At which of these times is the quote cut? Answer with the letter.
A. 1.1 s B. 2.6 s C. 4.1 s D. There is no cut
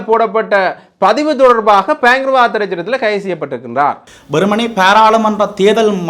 C